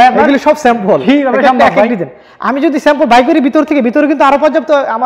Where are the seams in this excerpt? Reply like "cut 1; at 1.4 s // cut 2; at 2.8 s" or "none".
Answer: none